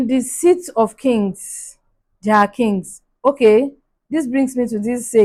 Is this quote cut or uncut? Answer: uncut